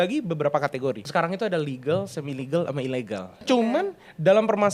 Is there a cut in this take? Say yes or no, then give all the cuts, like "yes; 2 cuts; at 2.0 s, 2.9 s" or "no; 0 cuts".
yes; 2 cuts; at 1.0 s, 3.4 s